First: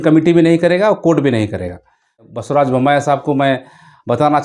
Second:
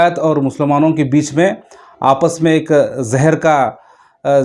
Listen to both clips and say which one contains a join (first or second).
first